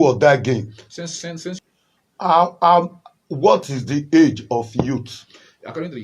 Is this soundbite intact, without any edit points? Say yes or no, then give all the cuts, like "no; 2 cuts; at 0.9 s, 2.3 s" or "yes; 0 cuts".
no; 1 cut; at 1.6 s